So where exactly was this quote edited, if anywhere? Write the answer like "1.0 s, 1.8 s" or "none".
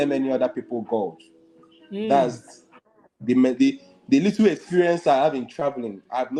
none